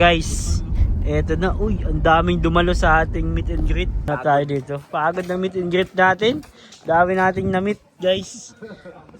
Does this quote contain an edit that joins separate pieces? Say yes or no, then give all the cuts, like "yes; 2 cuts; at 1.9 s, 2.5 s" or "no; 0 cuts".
yes; 1 cut; at 4.1 s